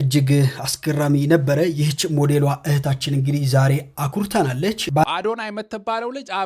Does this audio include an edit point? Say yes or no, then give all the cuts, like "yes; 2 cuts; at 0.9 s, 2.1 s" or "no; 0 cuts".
yes; 1 cut; at 5.0 s